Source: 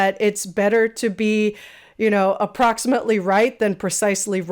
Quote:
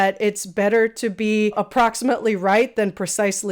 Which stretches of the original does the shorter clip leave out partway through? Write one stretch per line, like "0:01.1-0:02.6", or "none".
0:01.5-0:02.4